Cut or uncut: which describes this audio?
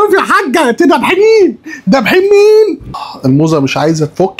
cut